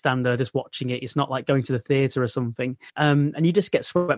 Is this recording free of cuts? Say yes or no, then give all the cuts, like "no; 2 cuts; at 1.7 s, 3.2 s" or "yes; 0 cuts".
no; 1 cut; at 2.8 s